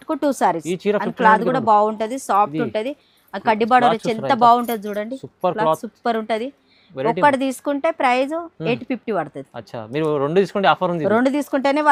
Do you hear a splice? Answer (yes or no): no